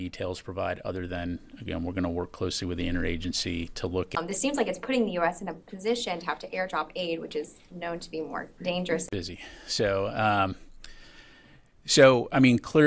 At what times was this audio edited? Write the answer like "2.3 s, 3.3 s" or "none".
none